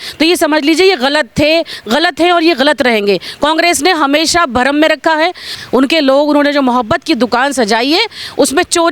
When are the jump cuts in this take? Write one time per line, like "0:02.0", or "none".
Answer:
0:05.5